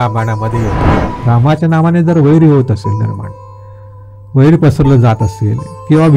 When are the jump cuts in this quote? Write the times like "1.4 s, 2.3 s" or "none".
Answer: 1.1 s

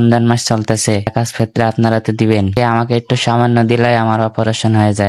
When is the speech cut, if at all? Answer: 1.1 s, 2.5 s

